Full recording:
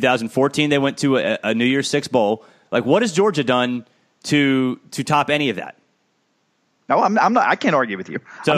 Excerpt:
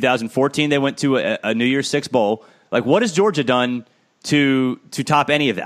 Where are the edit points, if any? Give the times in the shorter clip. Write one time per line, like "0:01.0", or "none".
none